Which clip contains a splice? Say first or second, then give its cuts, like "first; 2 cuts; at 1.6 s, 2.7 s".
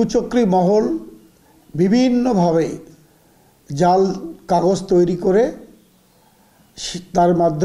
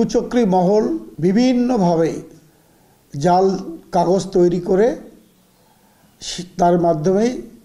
second; 1 cut; at 1.1 s